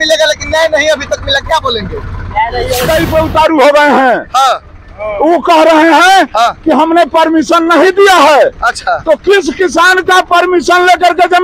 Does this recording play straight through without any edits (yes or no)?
no